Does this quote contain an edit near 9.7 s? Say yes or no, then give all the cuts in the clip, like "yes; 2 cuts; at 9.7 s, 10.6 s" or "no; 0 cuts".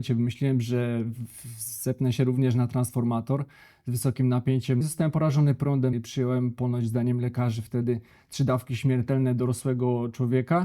no; 2 cuts; at 4.8 s, 5.9 s